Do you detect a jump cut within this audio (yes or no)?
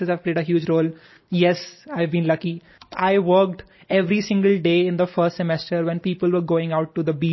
yes